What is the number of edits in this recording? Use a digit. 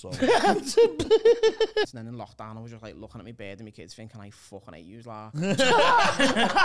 1